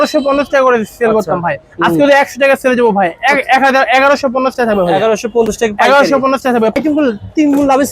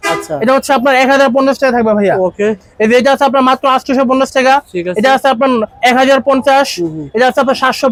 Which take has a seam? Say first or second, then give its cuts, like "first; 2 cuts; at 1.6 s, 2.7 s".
first; 1 cut; at 6.8 s